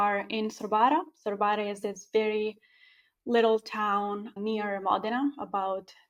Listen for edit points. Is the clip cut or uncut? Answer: uncut